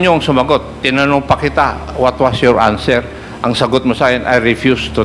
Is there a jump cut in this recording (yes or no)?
no